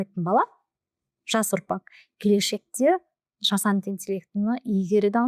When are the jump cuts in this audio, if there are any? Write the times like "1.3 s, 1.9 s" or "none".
none